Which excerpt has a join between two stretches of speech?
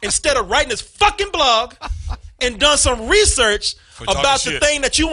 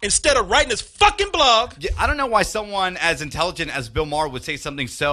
second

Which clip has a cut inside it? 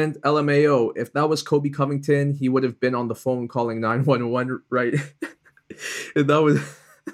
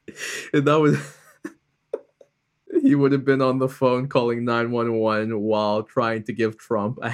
second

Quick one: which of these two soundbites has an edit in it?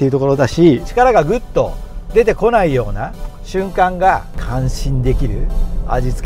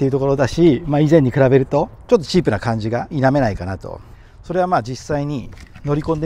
first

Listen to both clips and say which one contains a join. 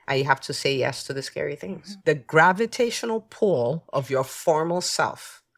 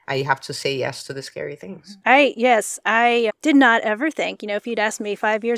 first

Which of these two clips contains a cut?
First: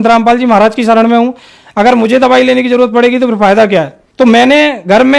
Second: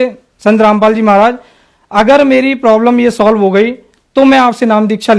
first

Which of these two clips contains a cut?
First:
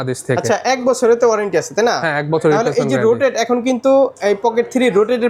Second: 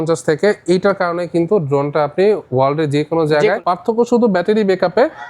second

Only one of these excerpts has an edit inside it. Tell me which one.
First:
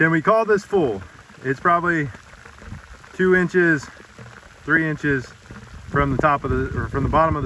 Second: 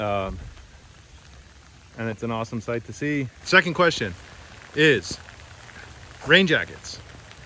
second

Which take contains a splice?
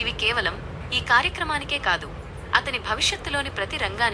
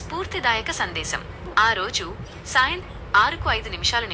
second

